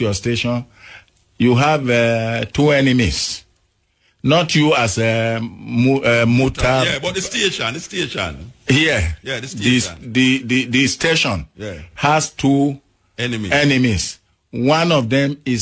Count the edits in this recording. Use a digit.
0